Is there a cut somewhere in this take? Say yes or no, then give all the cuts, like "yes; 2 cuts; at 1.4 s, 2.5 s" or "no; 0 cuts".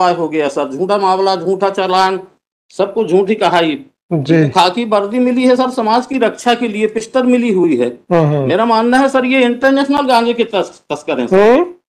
no; 0 cuts